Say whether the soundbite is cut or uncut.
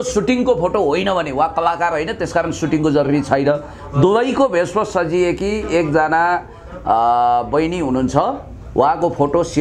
uncut